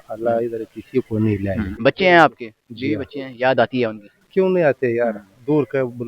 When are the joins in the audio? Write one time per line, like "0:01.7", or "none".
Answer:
0:01.7